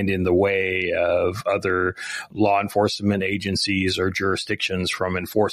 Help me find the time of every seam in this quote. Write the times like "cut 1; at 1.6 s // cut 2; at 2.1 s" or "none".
none